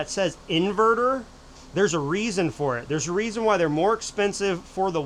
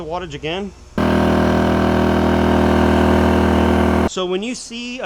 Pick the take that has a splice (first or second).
second